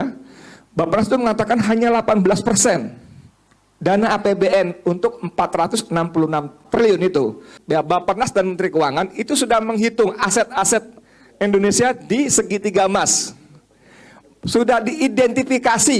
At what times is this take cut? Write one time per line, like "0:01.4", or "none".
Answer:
0:06.6
0:07.5